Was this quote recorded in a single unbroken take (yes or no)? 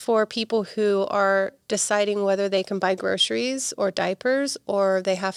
yes